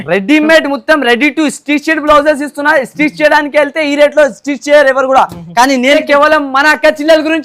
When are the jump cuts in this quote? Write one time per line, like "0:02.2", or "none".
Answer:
0:06.0